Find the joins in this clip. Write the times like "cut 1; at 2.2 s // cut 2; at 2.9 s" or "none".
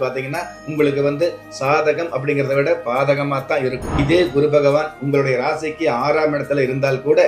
cut 1; at 3.9 s